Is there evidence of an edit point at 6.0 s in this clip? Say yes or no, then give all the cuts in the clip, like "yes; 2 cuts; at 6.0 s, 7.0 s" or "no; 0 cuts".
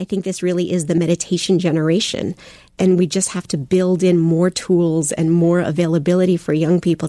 no; 2 cuts; at 1.0 s, 2.7 s